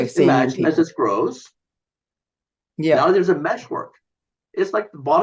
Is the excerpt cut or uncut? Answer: uncut